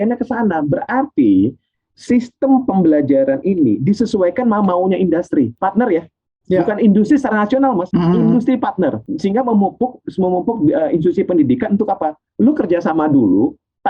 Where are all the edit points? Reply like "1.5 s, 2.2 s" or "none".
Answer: 5.5 s, 7.8 s, 9.1 s